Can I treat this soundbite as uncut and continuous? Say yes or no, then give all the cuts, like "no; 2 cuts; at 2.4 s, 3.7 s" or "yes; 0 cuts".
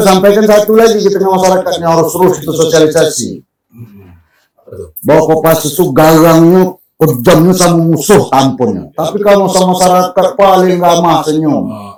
yes; 0 cuts